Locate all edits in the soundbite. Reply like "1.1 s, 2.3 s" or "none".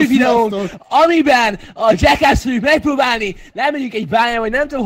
none